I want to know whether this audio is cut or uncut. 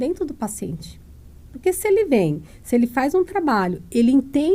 uncut